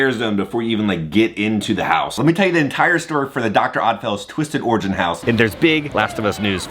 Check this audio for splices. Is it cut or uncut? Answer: cut